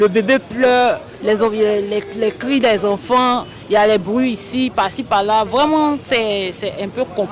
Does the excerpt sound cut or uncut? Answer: uncut